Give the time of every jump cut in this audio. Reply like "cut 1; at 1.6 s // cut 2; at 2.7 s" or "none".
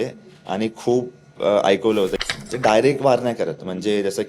cut 1; at 2.3 s

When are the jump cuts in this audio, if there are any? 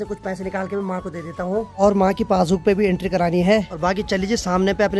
none

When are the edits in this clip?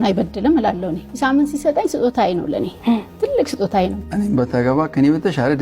none

